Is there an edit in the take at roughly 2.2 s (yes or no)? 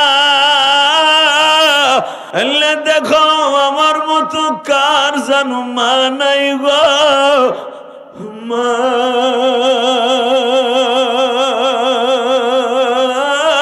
yes